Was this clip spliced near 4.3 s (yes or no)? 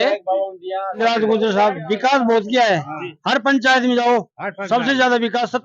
no